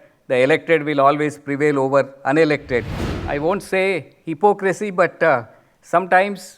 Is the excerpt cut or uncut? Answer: cut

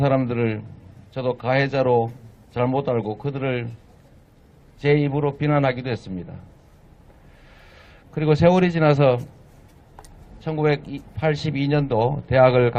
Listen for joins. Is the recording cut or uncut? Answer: uncut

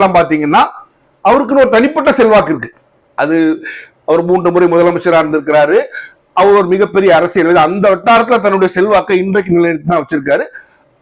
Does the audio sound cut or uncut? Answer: uncut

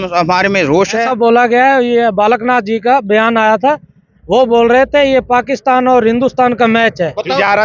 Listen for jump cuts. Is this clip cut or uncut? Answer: cut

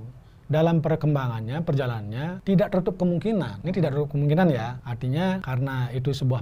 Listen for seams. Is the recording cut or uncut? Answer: cut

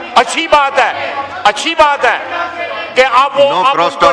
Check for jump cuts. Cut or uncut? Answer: uncut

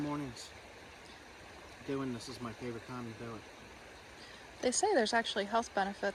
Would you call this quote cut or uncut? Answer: uncut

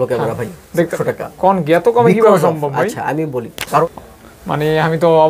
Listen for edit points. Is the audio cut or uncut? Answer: cut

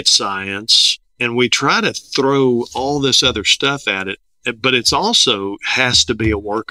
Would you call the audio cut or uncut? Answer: uncut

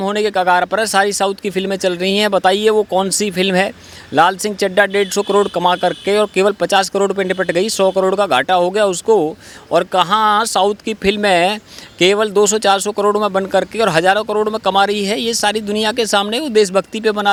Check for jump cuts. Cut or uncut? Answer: uncut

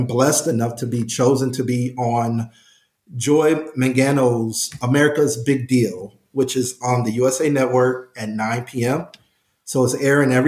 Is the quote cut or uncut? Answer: uncut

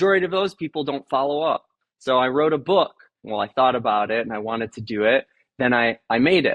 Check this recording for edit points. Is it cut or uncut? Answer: cut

